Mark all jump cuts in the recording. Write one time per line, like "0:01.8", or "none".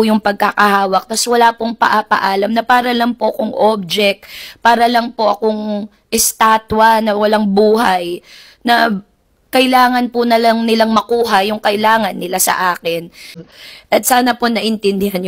0:13.4